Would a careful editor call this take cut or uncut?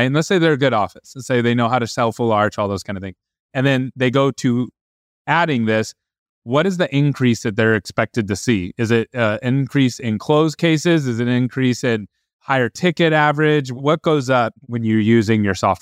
cut